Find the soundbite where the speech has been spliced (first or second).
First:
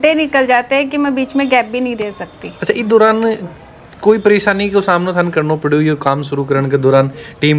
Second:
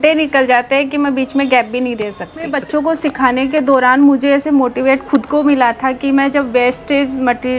second